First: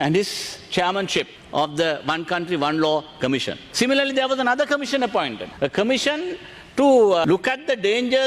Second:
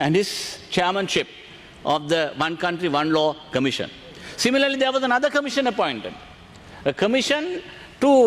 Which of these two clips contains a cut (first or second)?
first